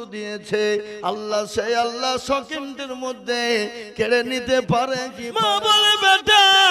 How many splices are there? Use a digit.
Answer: 1